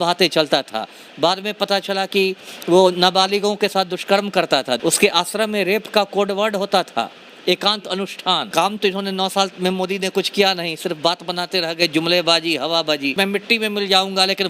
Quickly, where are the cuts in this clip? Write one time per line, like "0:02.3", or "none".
0:04.8
0:08.5
0:13.1